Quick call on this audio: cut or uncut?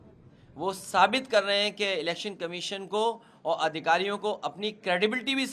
uncut